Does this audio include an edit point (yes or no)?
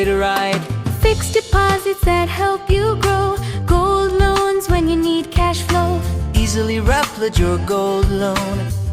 no